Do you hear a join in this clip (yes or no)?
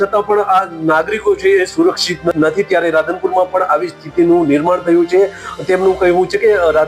yes